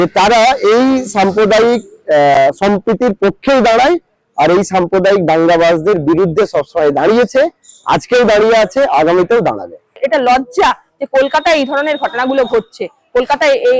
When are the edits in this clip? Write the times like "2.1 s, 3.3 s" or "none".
10.0 s